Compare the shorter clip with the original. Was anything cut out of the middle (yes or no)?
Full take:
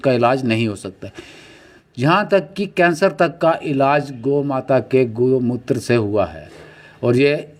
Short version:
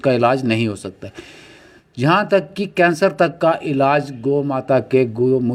no